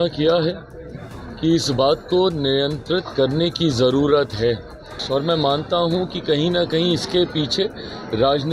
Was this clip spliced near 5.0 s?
yes; 1 cut; at 5.0 s

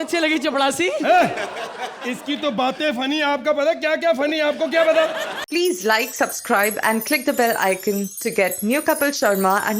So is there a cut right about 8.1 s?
no; 1 cut; at 5.4 s

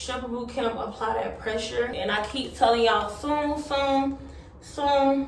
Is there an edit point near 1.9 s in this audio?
yes; 1 cut; at 1.9 s

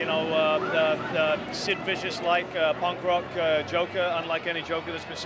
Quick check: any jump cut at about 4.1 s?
yes; 1 cut; at 4.1 s

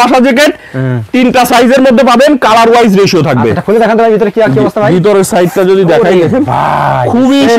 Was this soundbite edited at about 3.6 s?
no; 0 cuts

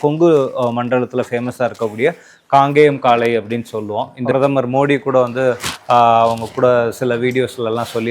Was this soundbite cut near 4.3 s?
yes; 1 cut; at 4.3 s

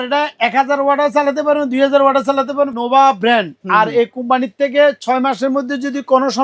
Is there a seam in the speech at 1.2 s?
no; 1 cut; at 2.7 s

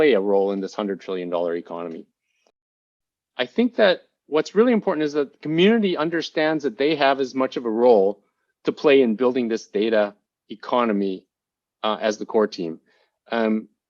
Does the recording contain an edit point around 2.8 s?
yes; 1 cut; at 2.8 s

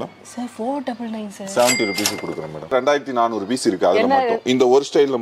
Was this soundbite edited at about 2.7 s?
yes; 1 cut; at 2.7 s

